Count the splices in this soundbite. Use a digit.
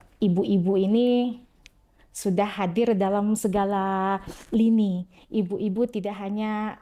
0